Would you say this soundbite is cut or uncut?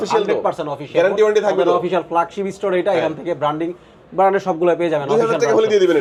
uncut